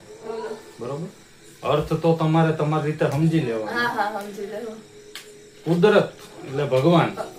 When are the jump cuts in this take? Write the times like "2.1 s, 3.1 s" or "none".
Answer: none